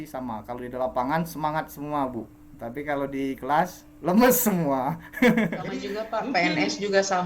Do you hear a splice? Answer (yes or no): yes